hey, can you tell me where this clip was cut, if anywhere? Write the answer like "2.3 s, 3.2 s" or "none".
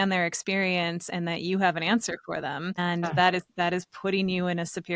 2.8 s